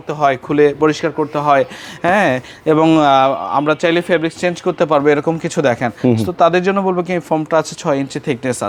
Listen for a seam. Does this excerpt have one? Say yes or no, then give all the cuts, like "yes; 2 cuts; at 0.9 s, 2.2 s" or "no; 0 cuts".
no; 0 cuts